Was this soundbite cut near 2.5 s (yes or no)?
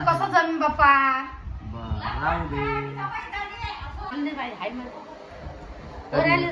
no